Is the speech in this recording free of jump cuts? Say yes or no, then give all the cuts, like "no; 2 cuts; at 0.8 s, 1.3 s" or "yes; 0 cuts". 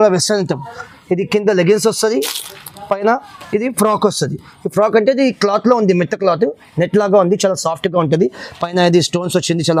yes; 0 cuts